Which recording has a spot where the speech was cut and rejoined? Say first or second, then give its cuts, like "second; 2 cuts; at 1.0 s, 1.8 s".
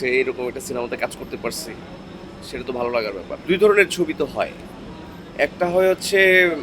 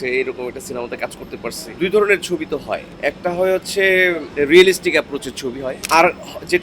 second; 4 cuts; at 1.7 s, 2.9 s, 4.3 s, 5.8 s